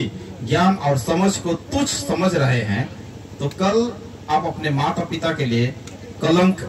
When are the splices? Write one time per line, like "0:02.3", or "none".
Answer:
none

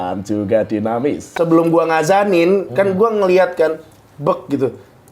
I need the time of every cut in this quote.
0:01.3

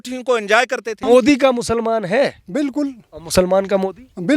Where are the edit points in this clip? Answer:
0:01.0

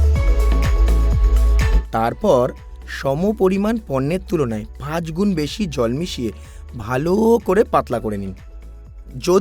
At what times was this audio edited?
0:01.8

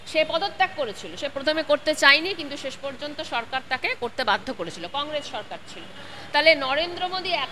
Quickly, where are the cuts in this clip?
none

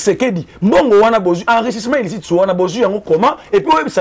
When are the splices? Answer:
none

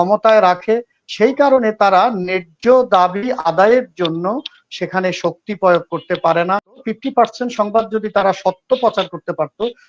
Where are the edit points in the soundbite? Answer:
0:06.9

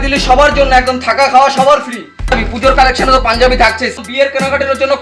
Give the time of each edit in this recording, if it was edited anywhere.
0:02.3
0:04.0

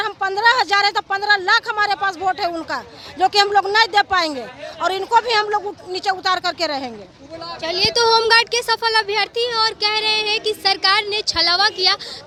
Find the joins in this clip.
none

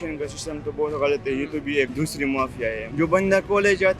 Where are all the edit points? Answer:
0:01.9
0:02.8

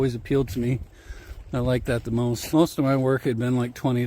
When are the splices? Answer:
0:02.4

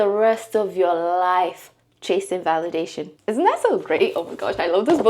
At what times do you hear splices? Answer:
0:03.1

